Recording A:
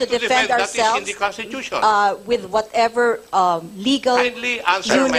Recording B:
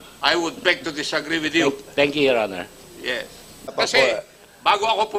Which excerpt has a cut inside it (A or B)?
B